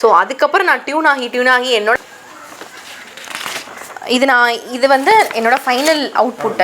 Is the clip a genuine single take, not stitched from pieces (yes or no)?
no